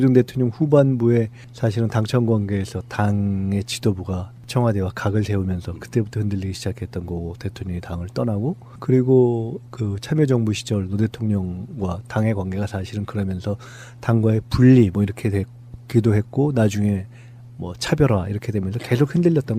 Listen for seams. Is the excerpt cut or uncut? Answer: cut